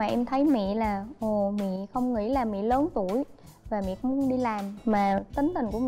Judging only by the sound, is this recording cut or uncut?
uncut